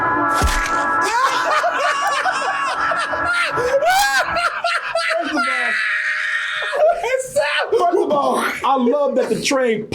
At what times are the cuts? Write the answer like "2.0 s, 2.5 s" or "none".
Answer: 0.9 s